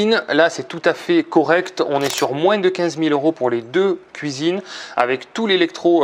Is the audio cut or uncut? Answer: uncut